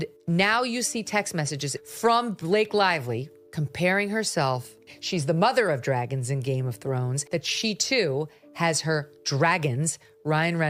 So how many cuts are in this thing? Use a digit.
0